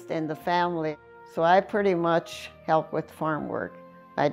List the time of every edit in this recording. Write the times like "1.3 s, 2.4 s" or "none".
1.0 s, 2.5 s

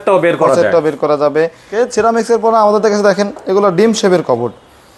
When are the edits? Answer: 1.7 s

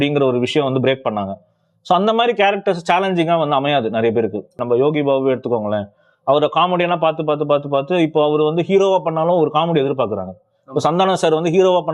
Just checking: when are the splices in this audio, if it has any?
4.6 s

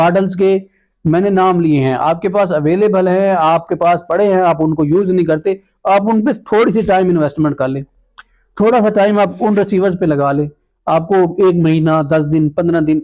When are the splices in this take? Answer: none

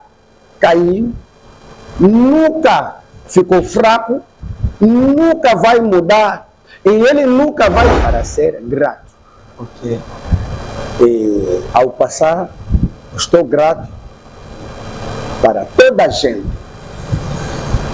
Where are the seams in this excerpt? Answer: 8.0 s

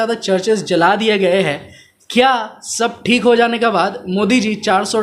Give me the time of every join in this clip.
none

